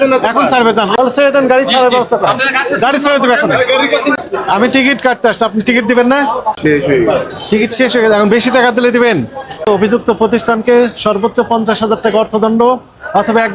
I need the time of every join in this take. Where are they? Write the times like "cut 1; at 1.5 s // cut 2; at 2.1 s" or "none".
cut 1; at 0.9 s // cut 2; at 4.2 s // cut 3; at 6.6 s // cut 4; at 9.7 s